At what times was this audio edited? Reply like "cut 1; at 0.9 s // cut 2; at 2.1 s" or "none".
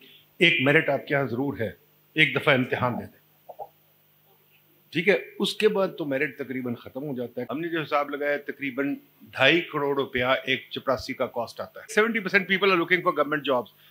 cut 1; at 7.5 s // cut 2; at 11.9 s